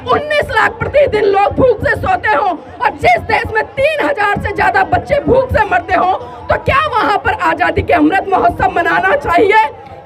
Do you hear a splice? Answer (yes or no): no